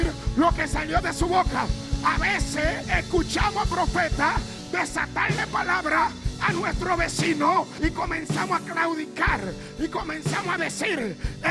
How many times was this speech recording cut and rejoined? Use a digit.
3